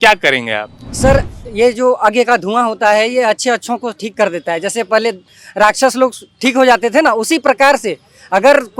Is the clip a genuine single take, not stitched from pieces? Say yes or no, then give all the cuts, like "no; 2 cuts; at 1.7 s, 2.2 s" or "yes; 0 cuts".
yes; 0 cuts